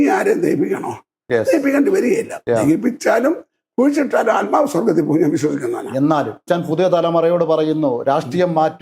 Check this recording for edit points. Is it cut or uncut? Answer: cut